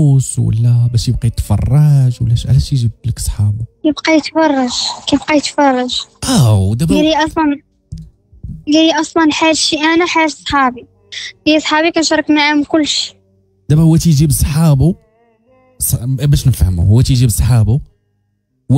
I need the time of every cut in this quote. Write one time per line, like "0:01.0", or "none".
none